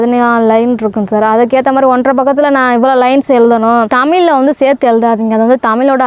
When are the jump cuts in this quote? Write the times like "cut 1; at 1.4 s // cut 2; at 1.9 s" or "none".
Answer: cut 1; at 3.9 s